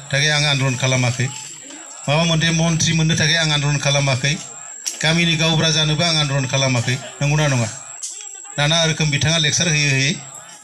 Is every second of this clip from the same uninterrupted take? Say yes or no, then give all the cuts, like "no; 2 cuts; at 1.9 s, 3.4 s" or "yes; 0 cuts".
yes; 0 cuts